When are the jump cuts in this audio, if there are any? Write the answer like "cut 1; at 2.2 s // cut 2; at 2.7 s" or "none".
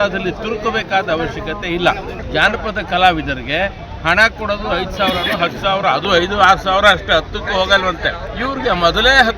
cut 1; at 2.2 s // cut 2; at 8.3 s